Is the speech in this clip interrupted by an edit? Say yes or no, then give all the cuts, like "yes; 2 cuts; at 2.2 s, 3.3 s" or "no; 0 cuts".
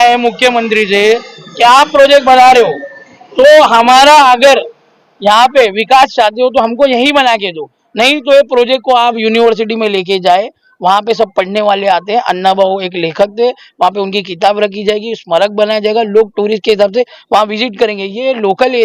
no; 0 cuts